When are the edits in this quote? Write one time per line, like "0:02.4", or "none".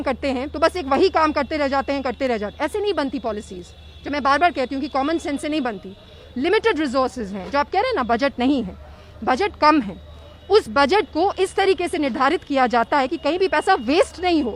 none

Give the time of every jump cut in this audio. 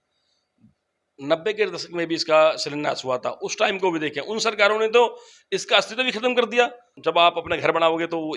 0:07.0

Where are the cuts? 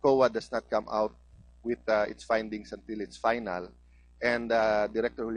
0:00.9

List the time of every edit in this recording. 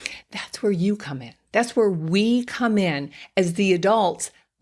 none

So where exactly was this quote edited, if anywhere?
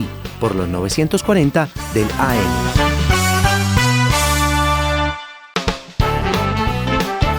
0:02.5
0:05.4

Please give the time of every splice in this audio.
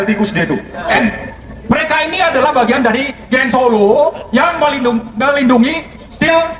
0:01.0

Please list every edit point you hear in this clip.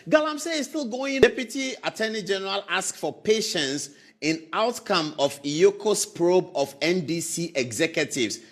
0:01.2

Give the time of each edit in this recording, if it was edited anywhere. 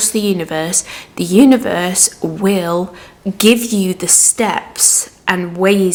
none

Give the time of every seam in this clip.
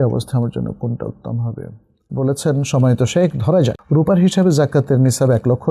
0:02.0
0:03.8

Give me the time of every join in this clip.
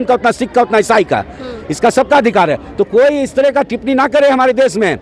none

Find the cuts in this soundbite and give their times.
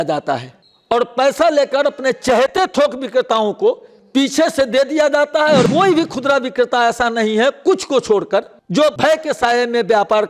0:05.7
0:09.0

